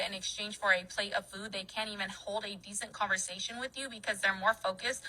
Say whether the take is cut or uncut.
uncut